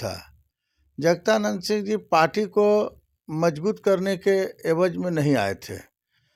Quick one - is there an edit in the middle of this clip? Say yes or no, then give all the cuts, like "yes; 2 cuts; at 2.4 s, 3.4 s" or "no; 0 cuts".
no; 0 cuts